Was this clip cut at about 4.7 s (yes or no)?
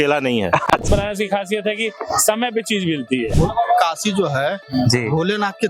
no